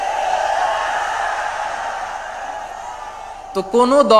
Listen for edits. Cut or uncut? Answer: uncut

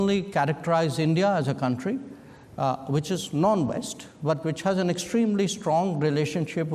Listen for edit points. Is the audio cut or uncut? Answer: uncut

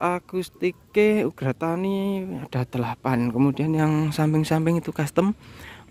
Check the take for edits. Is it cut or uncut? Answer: uncut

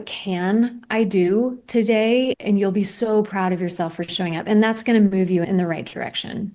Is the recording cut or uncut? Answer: uncut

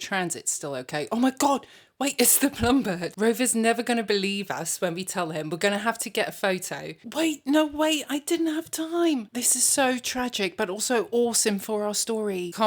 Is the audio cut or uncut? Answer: uncut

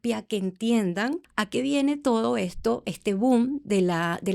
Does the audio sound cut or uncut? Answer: cut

